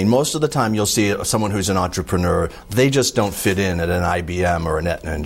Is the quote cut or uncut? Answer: uncut